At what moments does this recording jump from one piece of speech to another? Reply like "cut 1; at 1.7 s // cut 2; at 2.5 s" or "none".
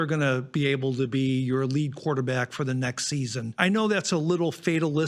cut 1; at 3.4 s